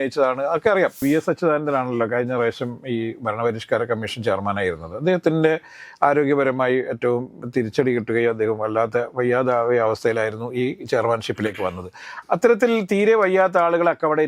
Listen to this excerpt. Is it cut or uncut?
cut